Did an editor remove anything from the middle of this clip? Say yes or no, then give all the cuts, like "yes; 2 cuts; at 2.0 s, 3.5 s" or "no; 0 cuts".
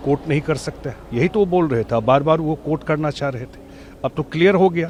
no; 0 cuts